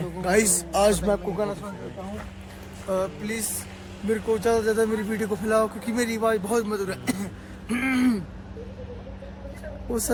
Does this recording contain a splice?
no; 0 cuts

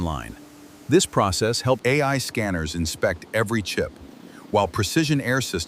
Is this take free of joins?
no; 1 cut; at 1.8 s

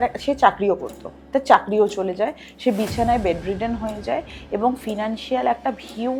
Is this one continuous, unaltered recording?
yes; 0 cuts

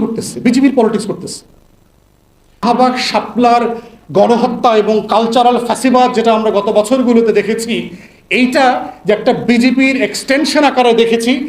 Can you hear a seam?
yes; 1 cut; at 2.6 s

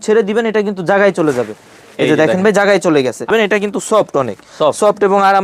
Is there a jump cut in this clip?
yes; 1 cut; at 3.3 s

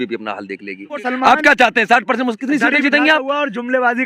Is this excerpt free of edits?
no; 1 cut; at 1.1 s

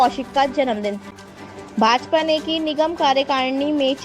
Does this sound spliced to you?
yes; 1 cut; at 1.1 s

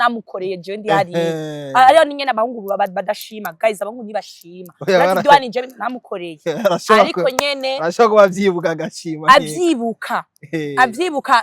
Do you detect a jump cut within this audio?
no; 0 cuts

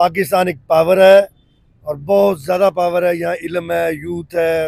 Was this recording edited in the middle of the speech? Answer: no; 0 cuts

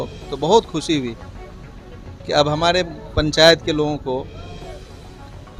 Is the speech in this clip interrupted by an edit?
no; 0 cuts

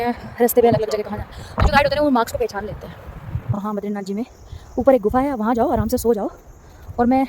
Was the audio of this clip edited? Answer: yes; 1 cut; at 3.6 s

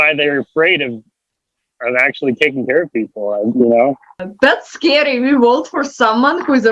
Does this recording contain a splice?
yes; 2 cuts; at 3.5 s, 4.2 s

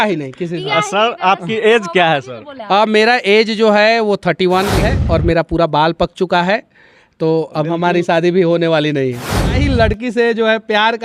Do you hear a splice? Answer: yes; 2 cuts; at 4.9 s, 9.6 s

